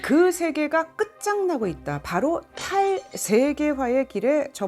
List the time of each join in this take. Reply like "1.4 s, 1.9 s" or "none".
none